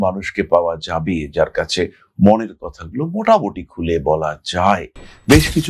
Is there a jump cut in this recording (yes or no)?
no